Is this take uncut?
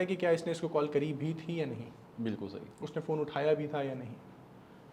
yes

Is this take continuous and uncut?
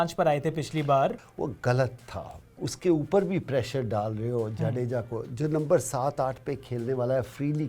no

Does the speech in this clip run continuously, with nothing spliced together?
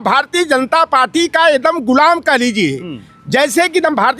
yes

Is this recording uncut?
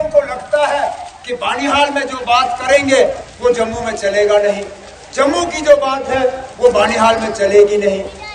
yes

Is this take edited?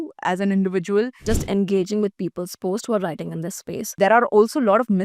yes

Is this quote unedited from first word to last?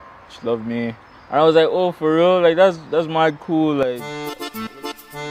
yes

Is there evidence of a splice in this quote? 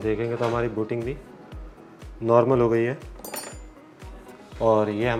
no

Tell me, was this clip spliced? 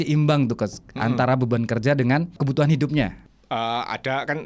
yes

